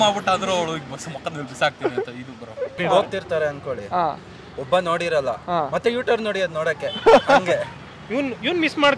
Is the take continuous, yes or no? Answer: no